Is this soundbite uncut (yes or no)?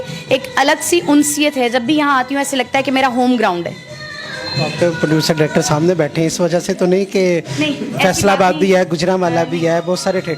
yes